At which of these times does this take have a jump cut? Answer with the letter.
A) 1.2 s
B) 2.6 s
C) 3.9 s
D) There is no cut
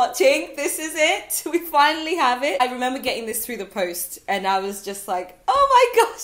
B